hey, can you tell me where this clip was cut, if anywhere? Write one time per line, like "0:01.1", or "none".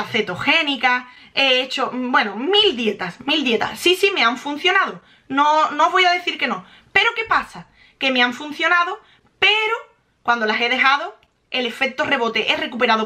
none